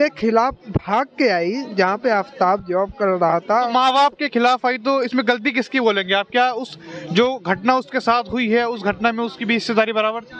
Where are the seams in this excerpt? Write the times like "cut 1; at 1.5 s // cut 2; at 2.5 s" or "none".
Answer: none